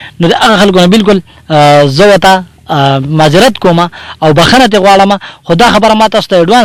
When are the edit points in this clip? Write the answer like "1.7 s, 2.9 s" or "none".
none